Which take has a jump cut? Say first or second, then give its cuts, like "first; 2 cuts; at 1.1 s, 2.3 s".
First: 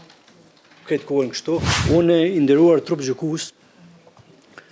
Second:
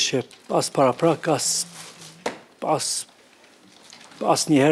first; 1 cut; at 1.8 s